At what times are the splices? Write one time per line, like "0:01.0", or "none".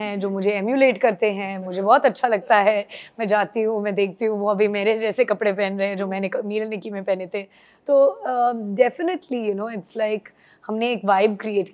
none